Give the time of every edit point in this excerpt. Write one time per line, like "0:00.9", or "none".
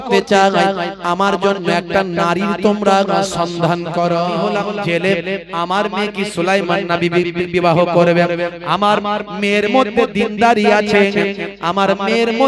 0:04.4